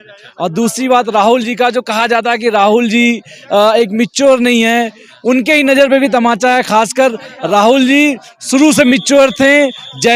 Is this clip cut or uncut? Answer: uncut